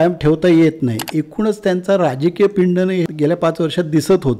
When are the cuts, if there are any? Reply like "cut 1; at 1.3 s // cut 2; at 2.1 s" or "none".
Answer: cut 1; at 1.1 s // cut 2; at 3.1 s